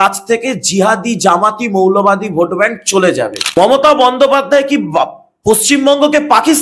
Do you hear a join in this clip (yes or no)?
yes